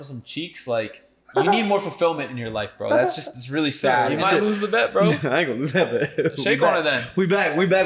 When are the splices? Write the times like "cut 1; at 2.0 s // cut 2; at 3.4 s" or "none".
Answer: cut 1; at 4.1 s